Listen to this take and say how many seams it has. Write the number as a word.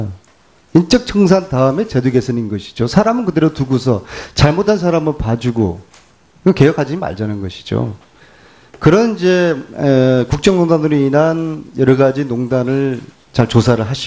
zero